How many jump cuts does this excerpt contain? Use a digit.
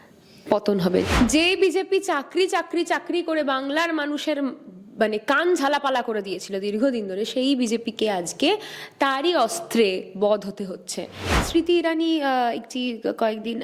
2